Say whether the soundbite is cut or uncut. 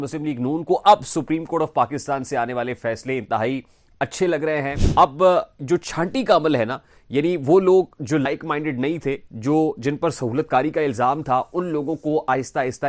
cut